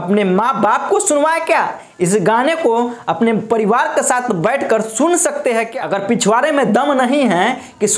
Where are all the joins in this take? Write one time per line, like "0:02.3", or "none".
0:05.8